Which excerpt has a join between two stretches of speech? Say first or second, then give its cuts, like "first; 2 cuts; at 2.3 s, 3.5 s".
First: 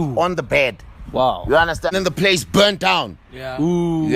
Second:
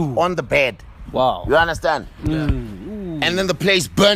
first; 1 cut; at 1.9 s